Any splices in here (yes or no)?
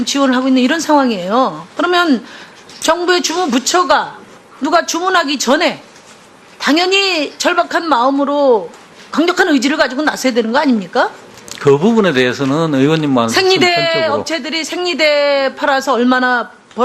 no